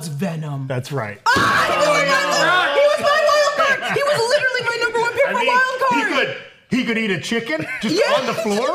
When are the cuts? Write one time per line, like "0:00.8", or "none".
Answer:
none